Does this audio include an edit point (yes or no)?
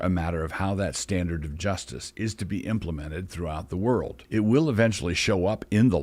yes